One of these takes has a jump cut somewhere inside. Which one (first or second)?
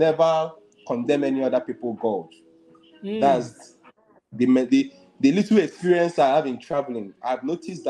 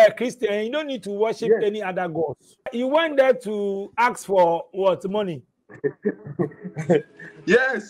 second